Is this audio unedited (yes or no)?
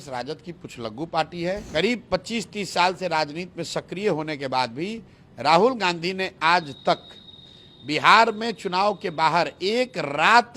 no